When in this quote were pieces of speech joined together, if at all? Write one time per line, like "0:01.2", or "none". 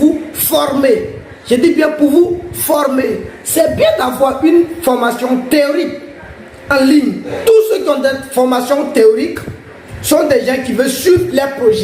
0:07.3